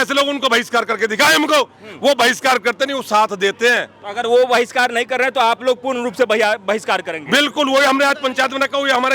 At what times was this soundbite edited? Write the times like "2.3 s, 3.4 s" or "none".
none